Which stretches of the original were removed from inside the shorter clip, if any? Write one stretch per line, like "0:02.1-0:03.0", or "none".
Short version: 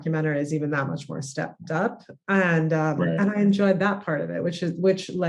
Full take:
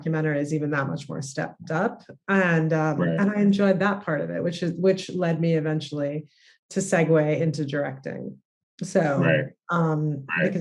none